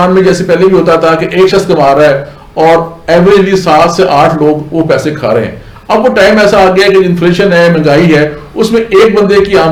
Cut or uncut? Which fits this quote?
uncut